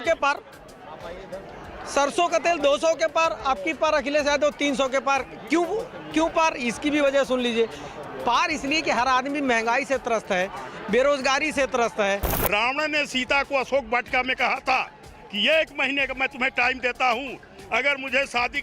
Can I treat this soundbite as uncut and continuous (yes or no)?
no